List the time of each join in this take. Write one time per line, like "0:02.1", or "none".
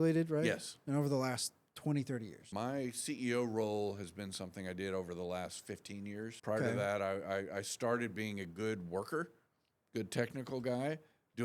0:02.4
0:06.4